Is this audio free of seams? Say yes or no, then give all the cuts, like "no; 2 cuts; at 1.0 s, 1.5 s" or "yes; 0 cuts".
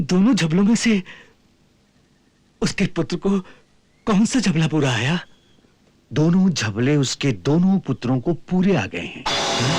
yes; 0 cuts